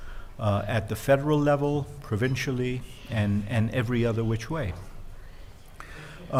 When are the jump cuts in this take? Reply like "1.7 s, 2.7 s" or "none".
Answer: none